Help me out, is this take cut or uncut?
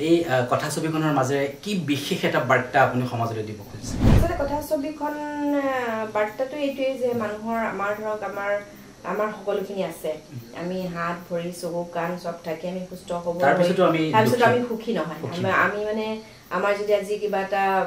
cut